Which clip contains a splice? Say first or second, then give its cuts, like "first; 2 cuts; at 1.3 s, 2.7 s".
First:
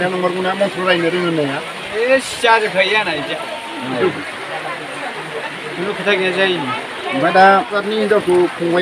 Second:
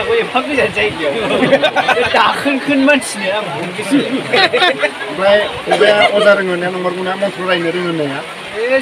first; 1 cut; at 7.8 s